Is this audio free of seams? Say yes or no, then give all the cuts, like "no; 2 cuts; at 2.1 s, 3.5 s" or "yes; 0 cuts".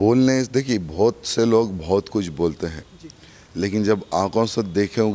yes; 0 cuts